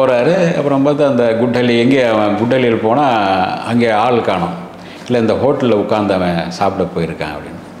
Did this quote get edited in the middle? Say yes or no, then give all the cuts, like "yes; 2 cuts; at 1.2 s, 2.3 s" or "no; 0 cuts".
no; 0 cuts